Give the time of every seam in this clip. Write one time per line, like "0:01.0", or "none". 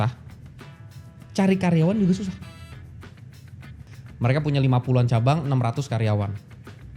0:03.9